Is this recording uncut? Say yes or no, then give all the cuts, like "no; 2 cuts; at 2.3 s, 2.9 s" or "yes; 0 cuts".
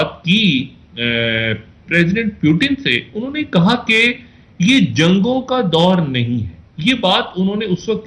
yes; 0 cuts